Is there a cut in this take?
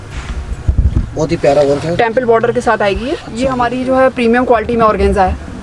yes; 1 cut; at 3.3 s

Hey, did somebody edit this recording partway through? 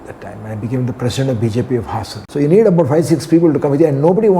yes; 1 cut; at 2.2 s

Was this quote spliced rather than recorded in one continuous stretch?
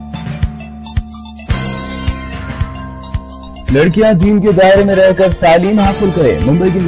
yes; 1 cut; at 3.4 s

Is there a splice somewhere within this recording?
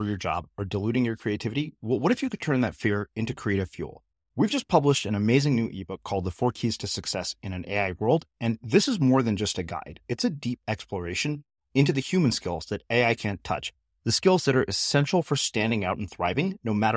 no; 0 cuts

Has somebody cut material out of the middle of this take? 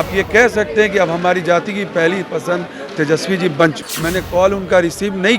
yes; 1 cut; at 3.9 s

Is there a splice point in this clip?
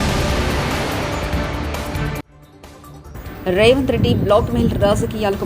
yes; 1 cut; at 2.3 s

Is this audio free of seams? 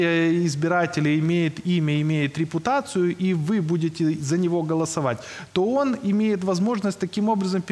yes; 0 cuts

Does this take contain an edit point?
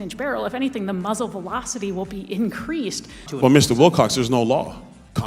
yes; 1 cut; at 3.2 s

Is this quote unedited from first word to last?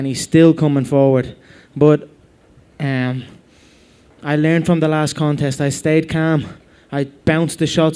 yes; 0 cuts

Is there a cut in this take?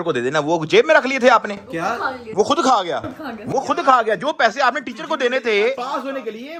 no; 0 cuts

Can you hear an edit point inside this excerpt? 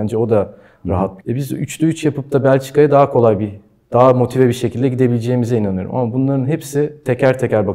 yes; 1 cut; at 1.2 s

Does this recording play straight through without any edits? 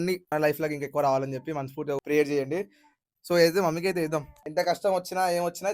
no; 1 cut; at 4.4 s

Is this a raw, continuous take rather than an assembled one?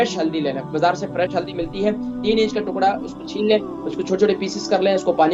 yes; 0 cuts

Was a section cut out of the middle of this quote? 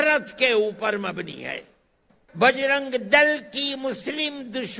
yes; 1 cut; at 2.2 s

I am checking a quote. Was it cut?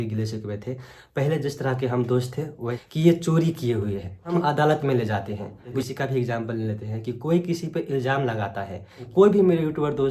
yes; 4 cuts; at 2.7 s, 4.3 s, 5.8 s, 9.0 s

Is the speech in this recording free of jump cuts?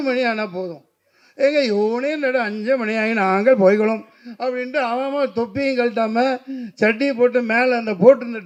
yes; 0 cuts

